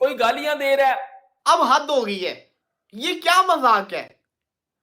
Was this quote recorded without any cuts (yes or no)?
no